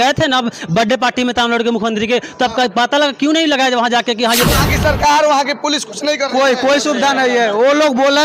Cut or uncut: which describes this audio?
cut